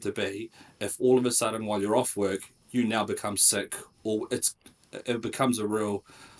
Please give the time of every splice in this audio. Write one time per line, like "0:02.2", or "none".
none